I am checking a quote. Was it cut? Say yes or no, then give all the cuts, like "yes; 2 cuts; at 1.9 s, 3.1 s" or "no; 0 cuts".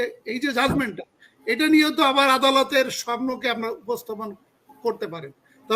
no; 0 cuts